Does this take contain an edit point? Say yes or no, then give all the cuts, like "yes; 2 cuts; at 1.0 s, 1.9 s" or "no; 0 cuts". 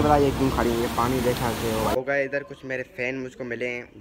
yes; 1 cut; at 2.0 s